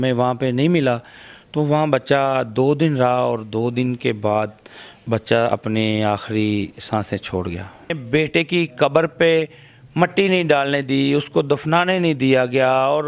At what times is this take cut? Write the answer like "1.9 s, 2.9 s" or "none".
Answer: 8.0 s